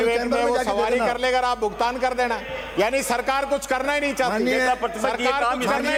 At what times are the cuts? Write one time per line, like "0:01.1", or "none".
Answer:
none

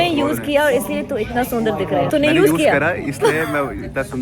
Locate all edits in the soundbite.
0:02.1

